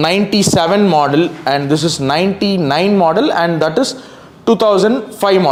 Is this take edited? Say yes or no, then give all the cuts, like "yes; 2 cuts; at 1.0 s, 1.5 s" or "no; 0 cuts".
no; 0 cuts